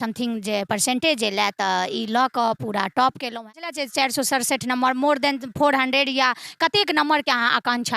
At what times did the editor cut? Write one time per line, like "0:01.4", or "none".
0:03.7